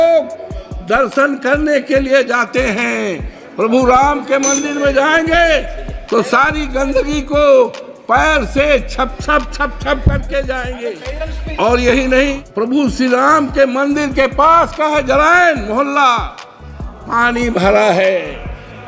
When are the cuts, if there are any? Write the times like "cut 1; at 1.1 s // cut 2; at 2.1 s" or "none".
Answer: cut 1; at 12.4 s